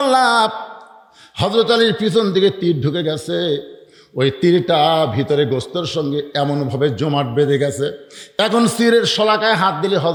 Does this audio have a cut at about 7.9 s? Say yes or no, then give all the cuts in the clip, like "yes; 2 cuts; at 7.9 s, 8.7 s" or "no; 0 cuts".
no; 0 cuts